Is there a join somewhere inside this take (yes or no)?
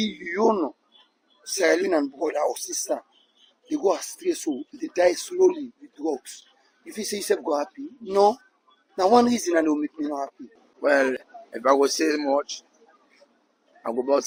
no